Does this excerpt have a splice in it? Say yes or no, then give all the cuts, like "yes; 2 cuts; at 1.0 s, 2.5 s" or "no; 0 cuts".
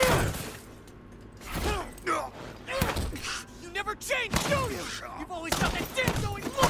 no; 0 cuts